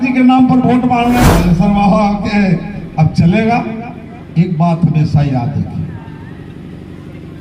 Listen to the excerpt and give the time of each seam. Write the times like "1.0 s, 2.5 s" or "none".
1.3 s